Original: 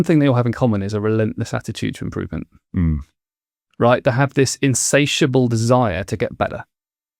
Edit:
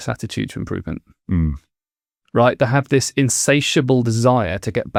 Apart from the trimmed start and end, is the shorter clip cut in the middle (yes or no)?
no